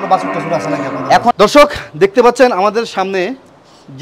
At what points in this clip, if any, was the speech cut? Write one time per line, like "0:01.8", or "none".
0:01.3